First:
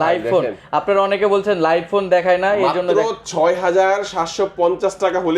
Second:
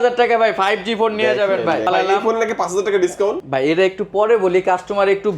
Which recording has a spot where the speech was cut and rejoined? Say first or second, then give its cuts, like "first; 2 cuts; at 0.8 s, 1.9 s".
second; 2 cuts; at 1.9 s, 3.4 s